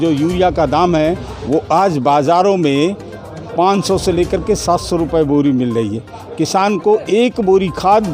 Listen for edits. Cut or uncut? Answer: uncut